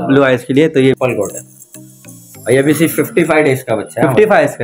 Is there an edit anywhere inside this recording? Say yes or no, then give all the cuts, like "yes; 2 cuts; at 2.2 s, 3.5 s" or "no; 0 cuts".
yes; 1 cut; at 1.0 s